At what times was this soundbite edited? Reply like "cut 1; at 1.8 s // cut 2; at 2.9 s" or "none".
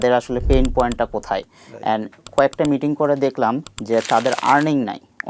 cut 1; at 2.2 s // cut 2; at 3.6 s

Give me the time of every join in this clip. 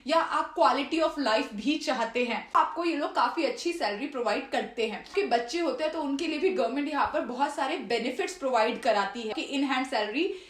cut 1; at 2.5 s // cut 2; at 5.1 s // cut 3; at 9.3 s

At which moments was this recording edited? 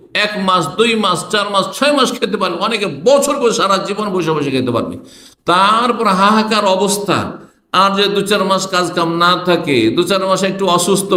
none

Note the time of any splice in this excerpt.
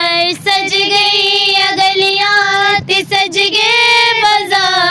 none

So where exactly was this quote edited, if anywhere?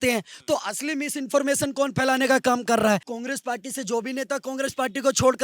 cut 1; at 3.1 s

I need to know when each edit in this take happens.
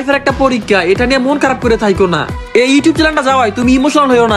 cut 1; at 2.3 s

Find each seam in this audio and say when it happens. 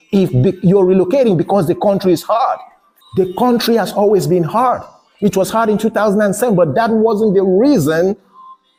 none

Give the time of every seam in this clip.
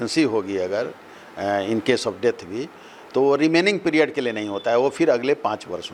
none

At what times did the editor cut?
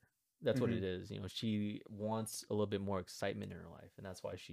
none

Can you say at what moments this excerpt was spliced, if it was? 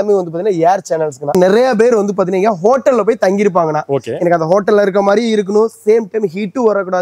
cut 1; at 1.2 s

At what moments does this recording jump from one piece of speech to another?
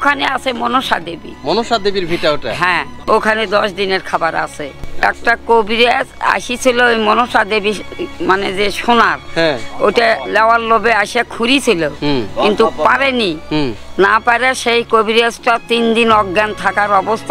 cut 1; at 3.1 s // cut 2; at 4.8 s

